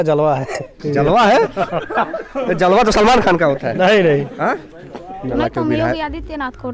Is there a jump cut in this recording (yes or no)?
yes